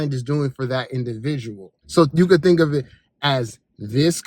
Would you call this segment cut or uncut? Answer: cut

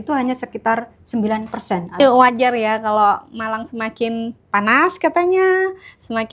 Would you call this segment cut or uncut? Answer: cut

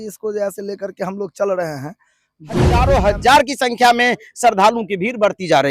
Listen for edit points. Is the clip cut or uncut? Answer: cut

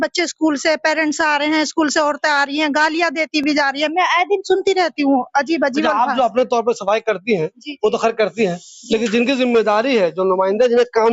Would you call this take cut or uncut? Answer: uncut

